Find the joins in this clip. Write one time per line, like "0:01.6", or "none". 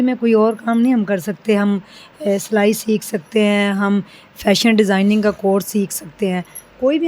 none